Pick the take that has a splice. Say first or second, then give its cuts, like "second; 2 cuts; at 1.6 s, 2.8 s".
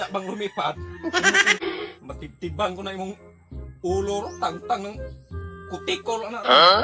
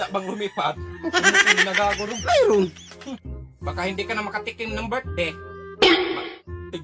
first; 1 cut; at 1.6 s